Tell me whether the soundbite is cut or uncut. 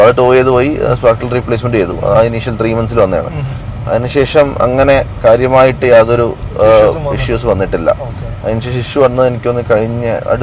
uncut